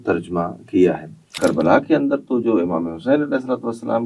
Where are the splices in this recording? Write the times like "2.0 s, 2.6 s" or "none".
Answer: 1.4 s